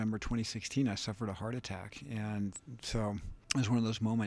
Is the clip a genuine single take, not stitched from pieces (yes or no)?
no